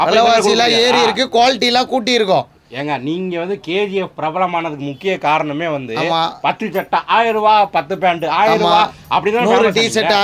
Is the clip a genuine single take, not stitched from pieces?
yes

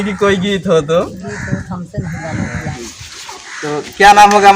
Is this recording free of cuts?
no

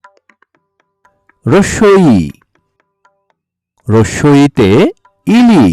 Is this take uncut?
no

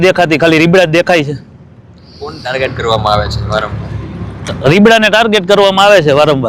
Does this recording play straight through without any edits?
yes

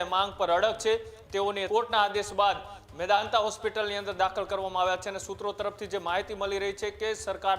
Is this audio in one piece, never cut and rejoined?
no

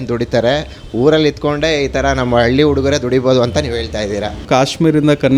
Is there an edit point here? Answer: yes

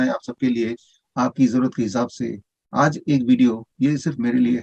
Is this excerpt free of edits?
yes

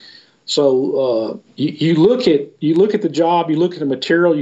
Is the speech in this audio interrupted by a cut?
yes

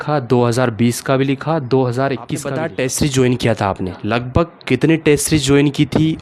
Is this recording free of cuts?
no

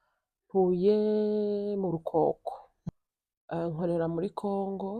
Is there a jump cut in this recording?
yes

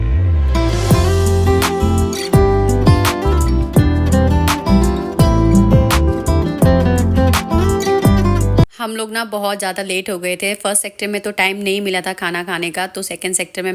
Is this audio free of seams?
yes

